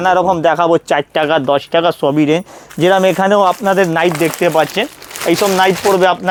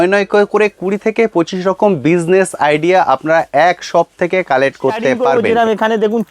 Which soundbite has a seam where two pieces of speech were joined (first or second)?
second